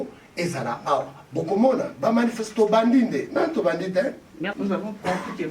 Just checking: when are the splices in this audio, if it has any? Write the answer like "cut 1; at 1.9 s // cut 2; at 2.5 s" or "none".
cut 1; at 4.5 s